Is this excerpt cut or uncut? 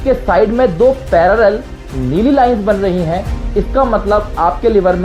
uncut